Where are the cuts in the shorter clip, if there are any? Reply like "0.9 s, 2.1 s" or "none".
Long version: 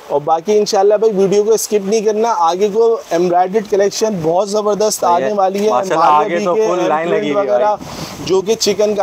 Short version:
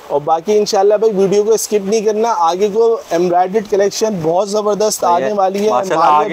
none